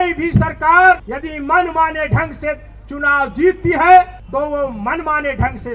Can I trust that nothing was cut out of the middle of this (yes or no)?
no